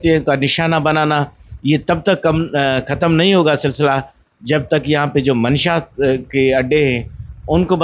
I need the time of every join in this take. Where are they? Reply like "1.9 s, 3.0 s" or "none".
none

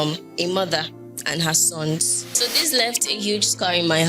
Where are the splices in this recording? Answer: 2.3 s

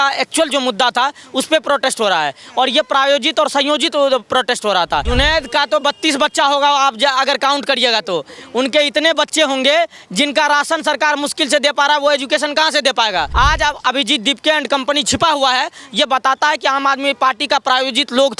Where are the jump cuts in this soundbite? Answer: 5.1 s, 13.3 s

